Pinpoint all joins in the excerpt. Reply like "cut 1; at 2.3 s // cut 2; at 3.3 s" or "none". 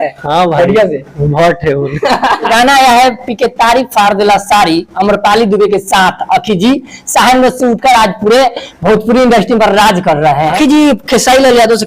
cut 1; at 2.5 s // cut 2; at 10.6 s